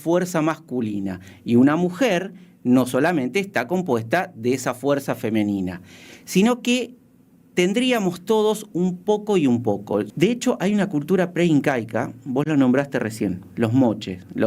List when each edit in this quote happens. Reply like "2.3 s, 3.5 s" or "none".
10.1 s